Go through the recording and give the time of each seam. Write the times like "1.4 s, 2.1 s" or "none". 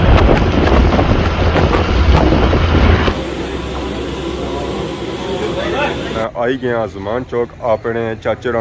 none